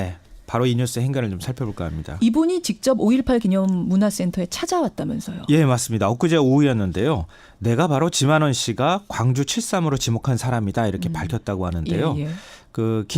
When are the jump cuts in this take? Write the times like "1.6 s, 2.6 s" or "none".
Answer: 2.6 s